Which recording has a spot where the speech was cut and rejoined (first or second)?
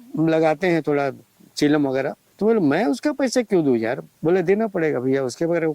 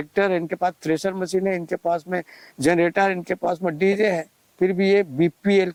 first